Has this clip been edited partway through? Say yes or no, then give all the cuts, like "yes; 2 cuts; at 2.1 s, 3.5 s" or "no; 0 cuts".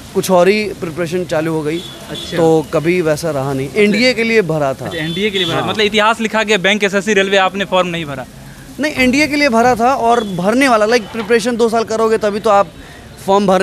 no; 0 cuts